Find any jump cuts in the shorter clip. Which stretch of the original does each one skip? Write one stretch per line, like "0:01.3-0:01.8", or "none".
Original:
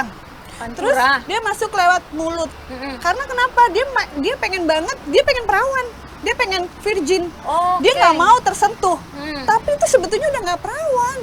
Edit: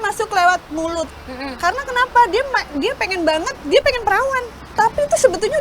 0:06.0-0:09.3